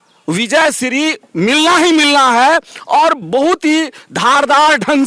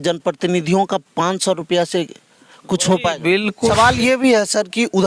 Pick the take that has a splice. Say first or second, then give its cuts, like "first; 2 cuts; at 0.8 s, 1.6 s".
second; 1 cut; at 3.7 s